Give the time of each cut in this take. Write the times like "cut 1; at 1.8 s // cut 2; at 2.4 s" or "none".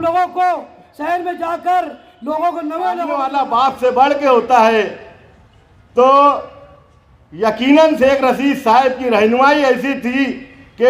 cut 1; at 3.2 s